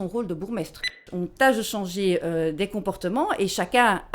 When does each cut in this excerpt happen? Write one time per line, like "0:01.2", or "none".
0:01.0